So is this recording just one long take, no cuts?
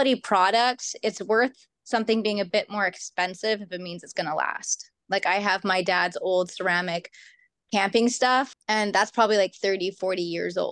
no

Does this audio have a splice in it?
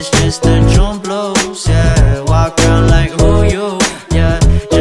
no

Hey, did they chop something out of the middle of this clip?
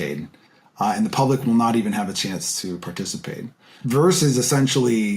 yes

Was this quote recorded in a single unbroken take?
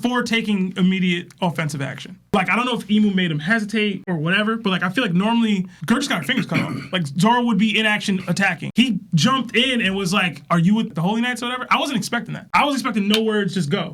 yes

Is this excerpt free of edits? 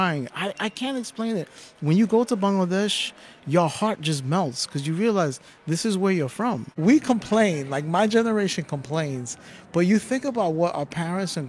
no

